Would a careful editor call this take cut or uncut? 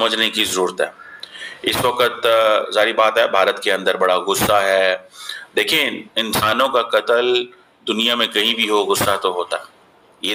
uncut